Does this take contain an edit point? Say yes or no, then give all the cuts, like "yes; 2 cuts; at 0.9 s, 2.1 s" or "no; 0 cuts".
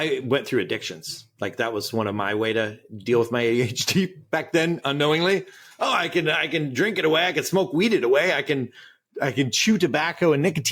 no; 0 cuts